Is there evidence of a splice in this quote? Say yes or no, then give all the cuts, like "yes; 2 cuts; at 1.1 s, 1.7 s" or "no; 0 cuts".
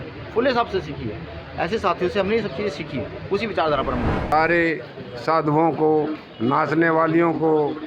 yes; 1 cut; at 4.2 s